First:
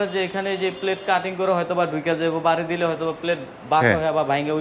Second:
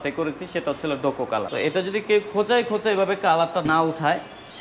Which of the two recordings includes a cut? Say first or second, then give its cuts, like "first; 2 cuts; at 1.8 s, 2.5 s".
second; 2 cuts; at 1.5 s, 3.6 s